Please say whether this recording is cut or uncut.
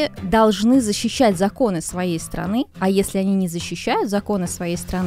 uncut